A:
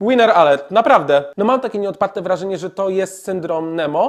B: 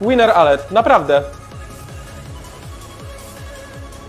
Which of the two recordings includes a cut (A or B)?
A